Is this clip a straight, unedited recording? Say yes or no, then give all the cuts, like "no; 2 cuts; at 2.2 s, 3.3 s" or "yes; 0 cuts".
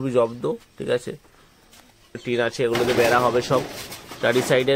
no; 1 cut; at 2.2 s